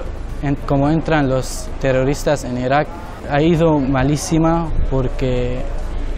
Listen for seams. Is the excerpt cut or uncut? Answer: cut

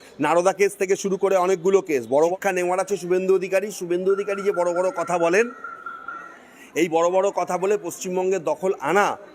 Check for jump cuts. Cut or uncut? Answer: cut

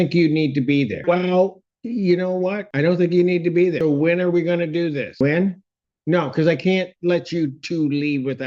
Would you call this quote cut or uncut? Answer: cut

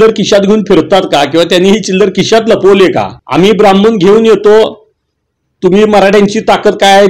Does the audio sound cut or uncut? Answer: cut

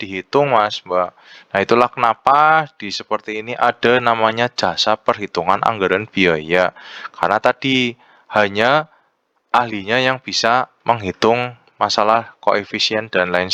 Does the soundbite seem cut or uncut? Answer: uncut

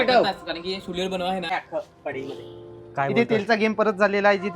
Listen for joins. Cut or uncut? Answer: cut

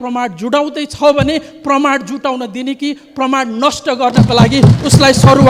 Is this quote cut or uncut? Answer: uncut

